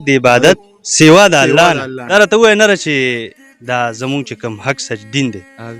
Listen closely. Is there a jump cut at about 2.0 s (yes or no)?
yes